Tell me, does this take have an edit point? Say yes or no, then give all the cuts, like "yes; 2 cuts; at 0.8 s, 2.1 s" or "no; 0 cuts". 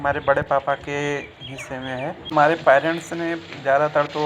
yes; 1 cut; at 2.3 s